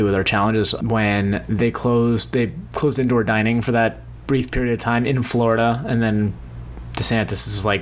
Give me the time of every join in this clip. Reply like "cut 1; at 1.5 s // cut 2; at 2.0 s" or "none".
none